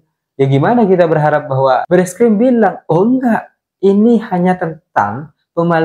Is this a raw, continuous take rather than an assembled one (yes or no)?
no